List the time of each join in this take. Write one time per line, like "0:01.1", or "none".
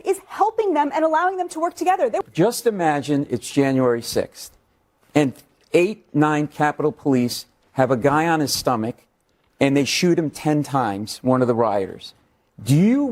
0:02.2